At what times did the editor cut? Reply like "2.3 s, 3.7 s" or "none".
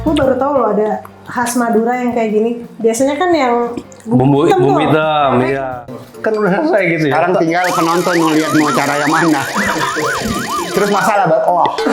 5.7 s